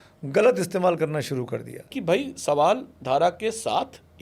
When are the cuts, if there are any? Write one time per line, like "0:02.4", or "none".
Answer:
0:02.0

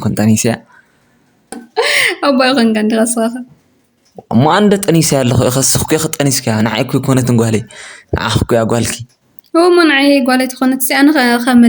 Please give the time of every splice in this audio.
0:01.6

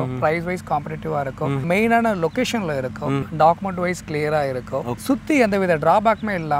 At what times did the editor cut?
0:01.6
0:03.3
0:04.9

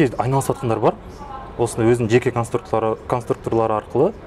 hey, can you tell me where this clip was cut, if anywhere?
none

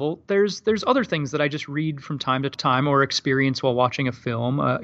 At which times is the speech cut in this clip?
0:02.6

